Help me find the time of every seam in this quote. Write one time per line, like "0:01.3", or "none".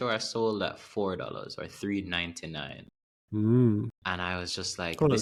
none